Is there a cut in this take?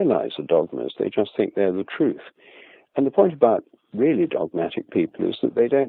no; 0 cuts

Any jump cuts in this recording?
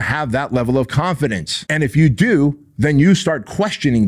yes; 1 cut; at 1.5 s

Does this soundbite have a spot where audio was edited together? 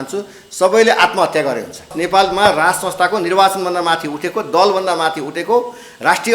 yes; 1 cut; at 2.0 s

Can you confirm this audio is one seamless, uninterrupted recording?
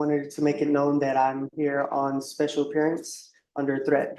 yes; 0 cuts

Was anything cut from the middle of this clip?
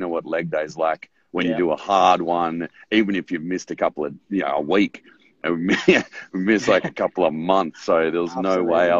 no; 0 cuts

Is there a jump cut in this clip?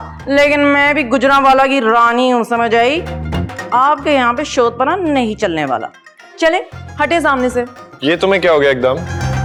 no; 0 cuts

